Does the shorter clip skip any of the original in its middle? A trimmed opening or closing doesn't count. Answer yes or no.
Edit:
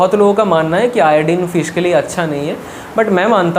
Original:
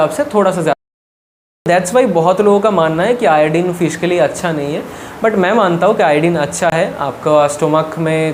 no